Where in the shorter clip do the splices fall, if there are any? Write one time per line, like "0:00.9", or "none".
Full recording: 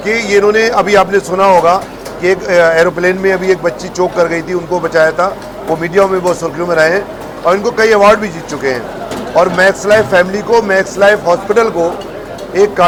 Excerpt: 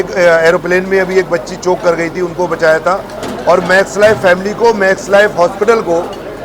0:03.1